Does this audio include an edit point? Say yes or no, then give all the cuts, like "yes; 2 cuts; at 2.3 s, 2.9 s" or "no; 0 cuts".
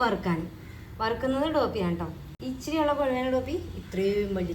no; 0 cuts